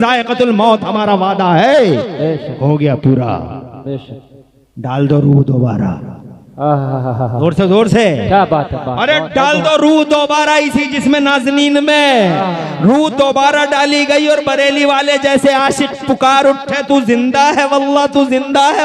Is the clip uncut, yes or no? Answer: yes